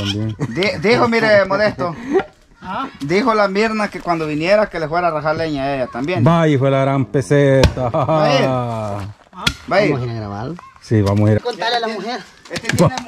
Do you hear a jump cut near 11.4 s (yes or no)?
yes